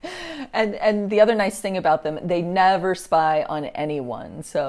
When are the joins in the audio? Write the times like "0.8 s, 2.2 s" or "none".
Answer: none